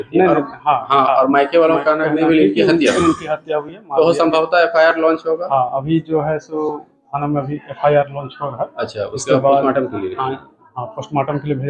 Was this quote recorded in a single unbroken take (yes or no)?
yes